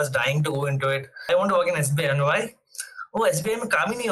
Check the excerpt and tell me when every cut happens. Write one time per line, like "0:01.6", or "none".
0:01.3